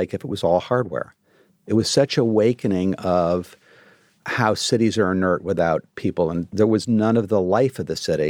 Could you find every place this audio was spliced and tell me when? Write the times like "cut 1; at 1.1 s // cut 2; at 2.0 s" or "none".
cut 1; at 1.6 s // cut 2; at 6.0 s